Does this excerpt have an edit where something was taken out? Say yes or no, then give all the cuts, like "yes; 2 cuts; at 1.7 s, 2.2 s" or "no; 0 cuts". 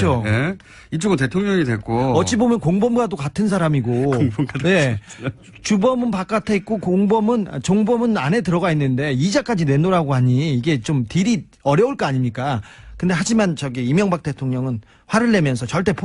no; 0 cuts